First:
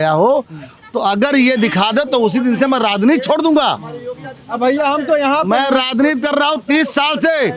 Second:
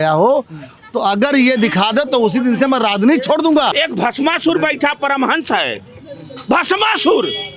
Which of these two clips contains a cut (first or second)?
second